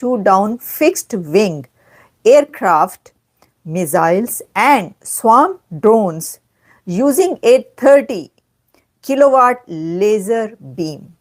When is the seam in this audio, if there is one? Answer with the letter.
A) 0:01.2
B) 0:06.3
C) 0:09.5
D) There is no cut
D